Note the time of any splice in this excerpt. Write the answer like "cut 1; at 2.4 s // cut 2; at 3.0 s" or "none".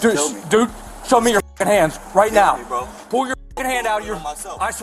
cut 1; at 1.3 s